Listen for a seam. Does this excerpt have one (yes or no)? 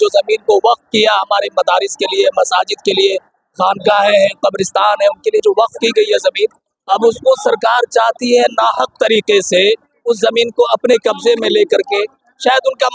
no